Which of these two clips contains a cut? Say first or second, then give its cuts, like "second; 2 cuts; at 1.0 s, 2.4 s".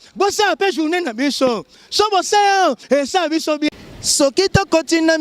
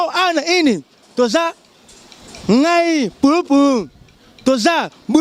first; 1 cut; at 3.7 s